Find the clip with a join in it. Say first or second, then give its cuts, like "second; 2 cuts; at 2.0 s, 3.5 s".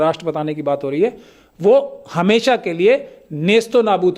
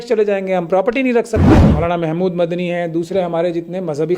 second; 1 cut; at 1.5 s